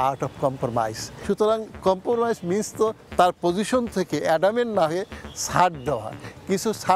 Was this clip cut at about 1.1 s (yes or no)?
yes